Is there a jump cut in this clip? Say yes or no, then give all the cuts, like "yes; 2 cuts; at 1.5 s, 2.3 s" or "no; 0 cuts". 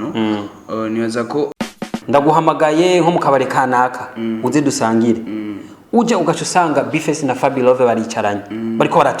yes; 1 cut; at 1.6 s